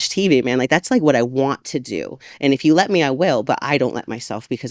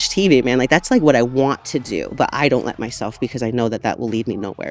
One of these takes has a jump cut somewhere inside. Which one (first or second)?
second